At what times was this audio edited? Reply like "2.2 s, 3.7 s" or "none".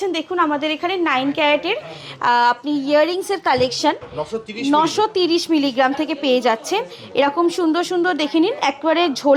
none